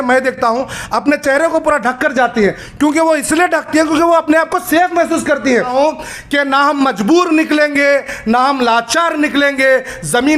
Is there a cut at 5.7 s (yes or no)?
yes